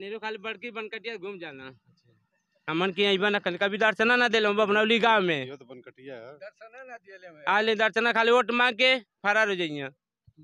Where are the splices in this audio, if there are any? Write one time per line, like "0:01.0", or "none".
none